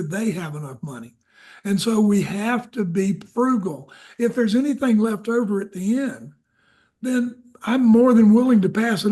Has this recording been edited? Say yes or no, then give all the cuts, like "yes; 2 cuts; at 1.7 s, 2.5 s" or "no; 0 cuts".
no; 0 cuts